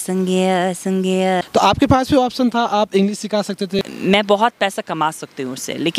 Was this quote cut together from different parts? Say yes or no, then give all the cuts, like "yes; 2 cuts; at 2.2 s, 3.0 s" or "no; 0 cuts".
yes; 2 cuts; at 1.4 s, 3.8 s